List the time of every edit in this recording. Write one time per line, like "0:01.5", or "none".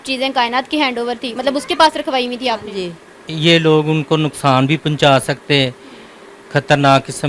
0:03.3